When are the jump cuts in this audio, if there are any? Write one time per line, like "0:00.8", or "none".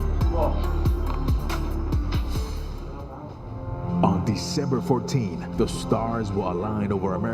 0:03.2